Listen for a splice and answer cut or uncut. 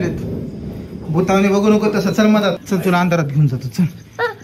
cut